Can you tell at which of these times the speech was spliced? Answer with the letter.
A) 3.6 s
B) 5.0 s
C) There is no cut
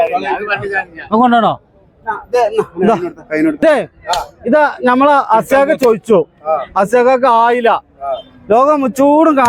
A